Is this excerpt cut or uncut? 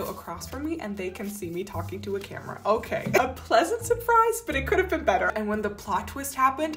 cut